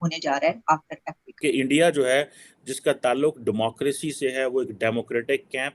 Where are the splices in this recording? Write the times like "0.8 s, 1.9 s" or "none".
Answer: 1.4 s

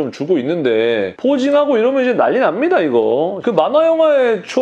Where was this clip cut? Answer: 3.4 s

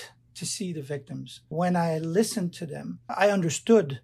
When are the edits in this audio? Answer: 1.4 s, 3.1 s

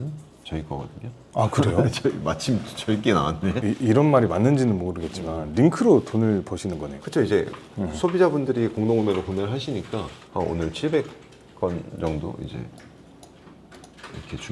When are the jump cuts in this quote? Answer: 3.6 s

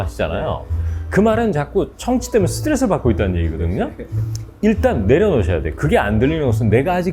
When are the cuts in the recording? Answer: none

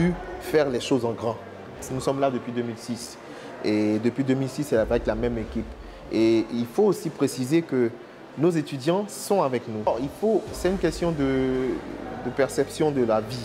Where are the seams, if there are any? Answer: 1.9 s, 9.9 s

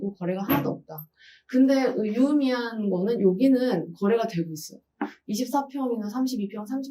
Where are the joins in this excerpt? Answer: none

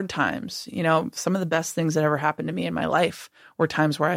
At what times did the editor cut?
none

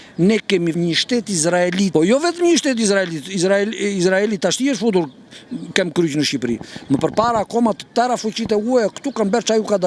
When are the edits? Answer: 0.8 s, 1.9 s

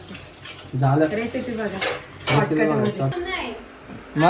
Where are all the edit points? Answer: 3.1 s

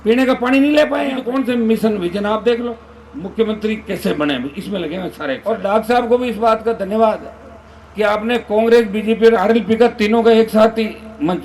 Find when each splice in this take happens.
1.2 s, 5.4 s

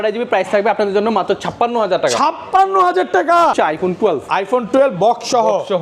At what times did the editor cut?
3.5 s

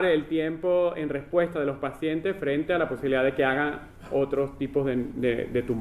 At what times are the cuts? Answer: none

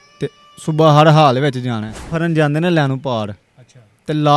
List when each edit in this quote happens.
2.1 s

